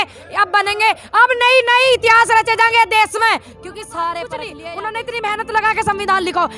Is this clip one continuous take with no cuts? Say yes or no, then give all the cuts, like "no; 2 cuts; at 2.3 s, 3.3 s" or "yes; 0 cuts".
no; 1 cut; at 4.6 s